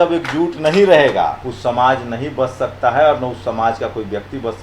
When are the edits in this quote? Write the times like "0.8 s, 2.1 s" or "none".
1.5 s